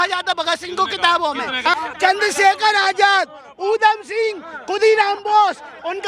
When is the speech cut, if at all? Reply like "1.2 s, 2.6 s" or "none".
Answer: 1.7 s